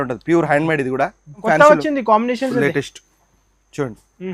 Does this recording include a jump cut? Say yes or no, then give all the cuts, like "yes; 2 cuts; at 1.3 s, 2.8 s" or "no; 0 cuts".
yes; 1 cut; at 1.4 s